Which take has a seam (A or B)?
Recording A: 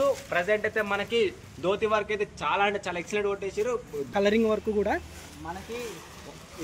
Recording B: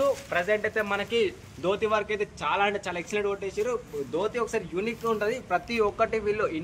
A